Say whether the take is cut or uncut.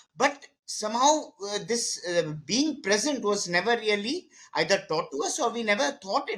uncut